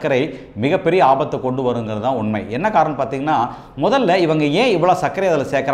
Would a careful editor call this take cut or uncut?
uncut